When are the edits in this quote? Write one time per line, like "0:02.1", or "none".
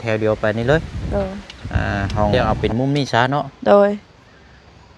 0:02.3